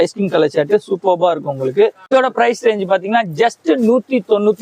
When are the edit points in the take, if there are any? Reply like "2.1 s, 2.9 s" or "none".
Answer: 2.1 s